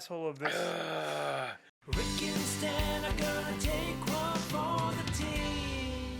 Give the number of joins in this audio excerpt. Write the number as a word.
one